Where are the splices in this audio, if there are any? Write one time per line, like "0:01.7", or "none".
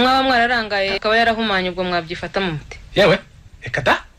none